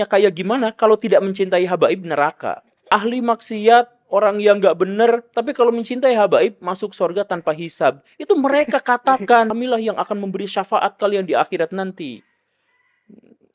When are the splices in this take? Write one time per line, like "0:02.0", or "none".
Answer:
0:02.8
0:09.5

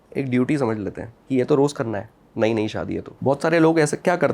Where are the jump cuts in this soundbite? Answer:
0:01.1
0:03.1

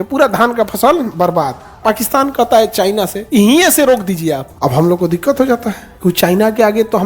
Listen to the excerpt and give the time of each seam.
0:01.6
0:03.2
0:04.5
0:05.8

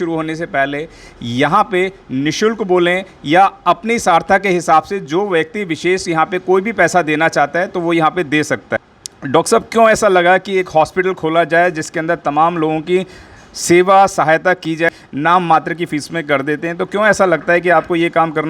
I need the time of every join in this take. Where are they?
0:08.7
0:14.9

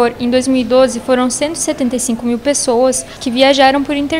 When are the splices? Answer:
0:03.2

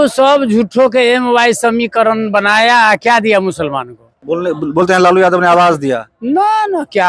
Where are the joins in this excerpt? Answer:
0:04.1

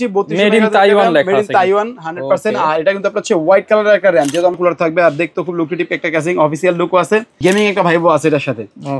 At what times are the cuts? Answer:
0:04.5
0:07.3

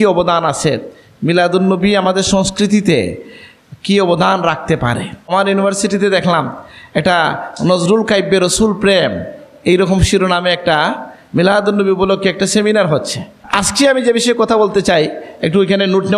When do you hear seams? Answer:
0:05.3
0:13.4

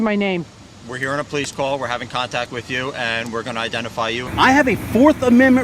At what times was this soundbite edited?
0:04.2

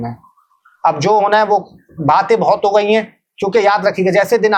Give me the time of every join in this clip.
none

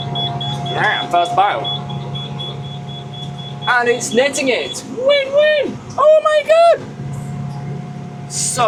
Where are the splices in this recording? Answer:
none

